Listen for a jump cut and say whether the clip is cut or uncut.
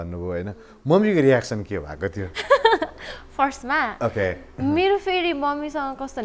uncut